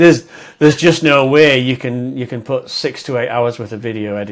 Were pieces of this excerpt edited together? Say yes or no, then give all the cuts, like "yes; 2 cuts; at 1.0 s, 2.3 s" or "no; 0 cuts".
no; 0 cuts